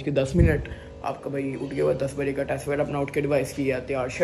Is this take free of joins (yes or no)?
yes